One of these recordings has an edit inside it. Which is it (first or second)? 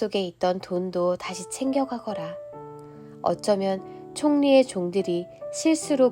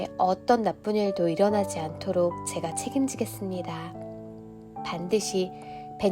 second